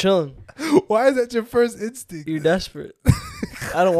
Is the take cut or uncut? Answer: cut